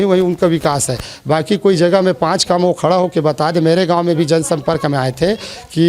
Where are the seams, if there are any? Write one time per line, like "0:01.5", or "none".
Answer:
none

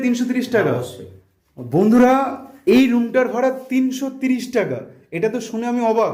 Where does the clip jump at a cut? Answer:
none

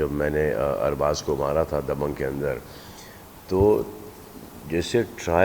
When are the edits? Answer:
none

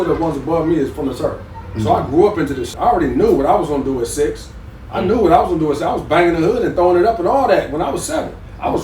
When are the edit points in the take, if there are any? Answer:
0:02.7

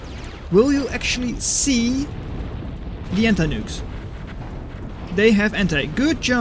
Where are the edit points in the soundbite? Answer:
0:04.9

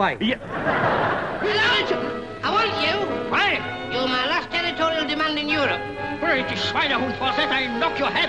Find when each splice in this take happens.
0:01.4

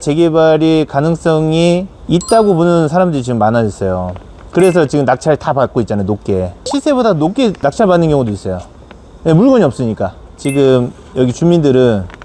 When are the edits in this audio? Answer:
0:01.9
0:06.6
0:07.6
0:10.3

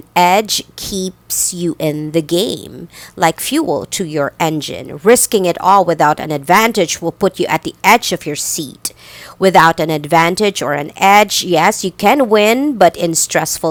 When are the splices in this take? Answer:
none

